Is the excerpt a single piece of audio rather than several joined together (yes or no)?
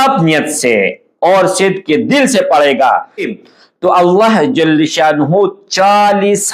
no